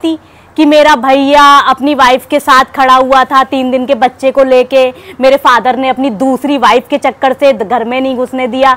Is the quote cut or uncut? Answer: uncut